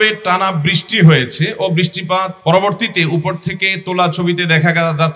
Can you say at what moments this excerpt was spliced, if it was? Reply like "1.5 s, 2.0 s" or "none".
2.3 s